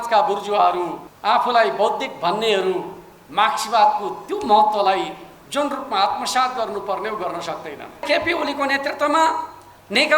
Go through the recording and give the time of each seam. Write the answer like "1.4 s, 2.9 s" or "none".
1.1 s, 8.0 s